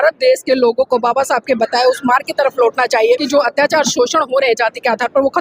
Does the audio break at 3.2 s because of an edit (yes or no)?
yes